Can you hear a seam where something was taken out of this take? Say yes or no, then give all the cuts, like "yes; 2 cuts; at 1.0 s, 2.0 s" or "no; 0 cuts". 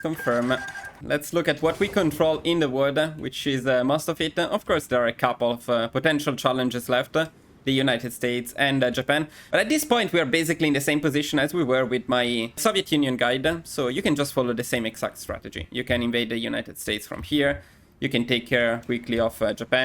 no; 0 cuts